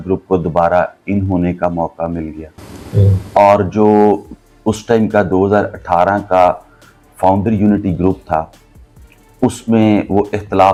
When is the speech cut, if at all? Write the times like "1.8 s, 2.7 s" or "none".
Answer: none